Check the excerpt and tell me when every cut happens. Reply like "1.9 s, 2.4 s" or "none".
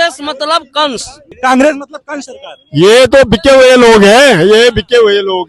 1.3 s